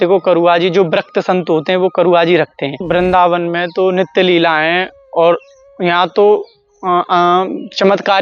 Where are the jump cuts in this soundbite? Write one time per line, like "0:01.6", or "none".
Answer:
0:02.9